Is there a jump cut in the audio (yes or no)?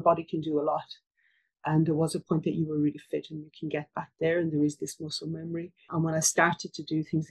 yes